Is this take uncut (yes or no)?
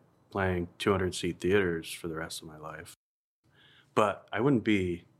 no